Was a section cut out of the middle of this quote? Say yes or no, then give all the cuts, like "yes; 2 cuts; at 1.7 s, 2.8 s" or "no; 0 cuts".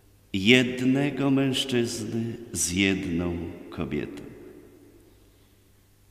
no; 0 cuts